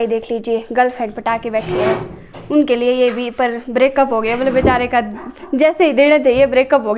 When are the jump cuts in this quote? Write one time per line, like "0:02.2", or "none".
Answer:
none